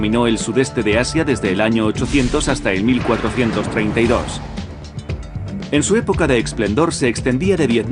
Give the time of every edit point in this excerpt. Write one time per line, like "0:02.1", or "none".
none

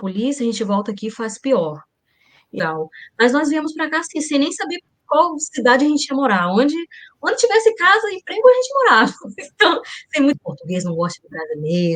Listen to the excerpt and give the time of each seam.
0:02.6
0:10.4

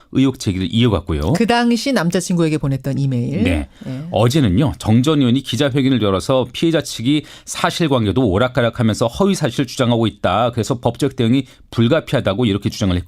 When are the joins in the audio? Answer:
0:08.8

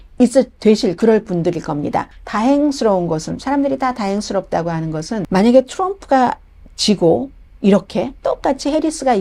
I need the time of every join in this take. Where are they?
0:02.1
0:05.3

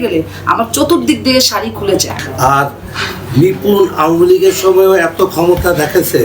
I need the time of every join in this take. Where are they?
0:02.2

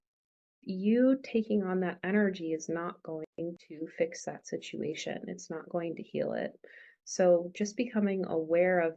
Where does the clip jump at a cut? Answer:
none

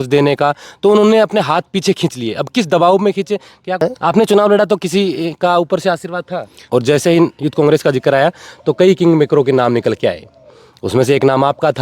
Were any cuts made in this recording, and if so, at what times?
0:03.8
0:06.6

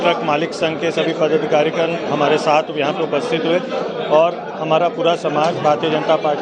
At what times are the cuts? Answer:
none

